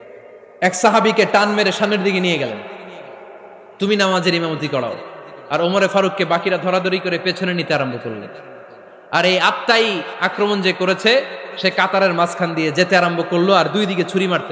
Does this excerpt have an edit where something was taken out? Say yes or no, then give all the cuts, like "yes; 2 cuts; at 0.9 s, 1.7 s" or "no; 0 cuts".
no; 0 cuts